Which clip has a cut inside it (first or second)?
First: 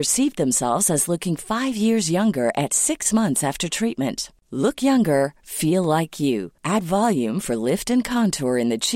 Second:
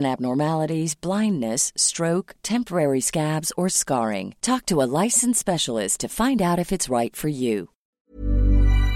second